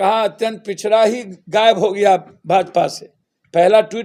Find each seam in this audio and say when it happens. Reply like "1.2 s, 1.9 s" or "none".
none